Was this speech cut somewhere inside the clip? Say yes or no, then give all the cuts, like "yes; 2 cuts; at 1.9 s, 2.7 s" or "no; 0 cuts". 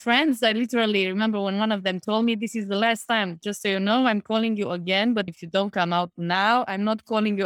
yes; 1 cut; at 5.4 s